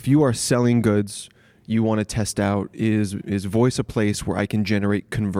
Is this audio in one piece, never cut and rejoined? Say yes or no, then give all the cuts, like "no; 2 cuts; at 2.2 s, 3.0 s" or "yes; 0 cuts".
yes; 0 cuts